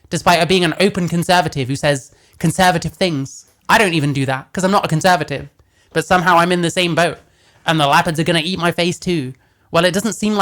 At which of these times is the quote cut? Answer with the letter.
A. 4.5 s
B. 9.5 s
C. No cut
C